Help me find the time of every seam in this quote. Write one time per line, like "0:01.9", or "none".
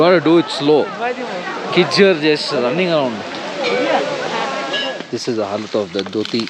0:04.8